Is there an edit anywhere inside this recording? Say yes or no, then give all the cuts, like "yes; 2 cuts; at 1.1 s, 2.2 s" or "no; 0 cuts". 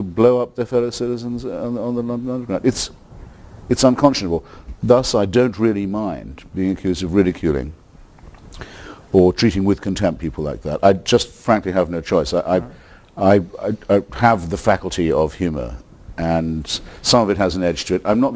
no; 0 cuts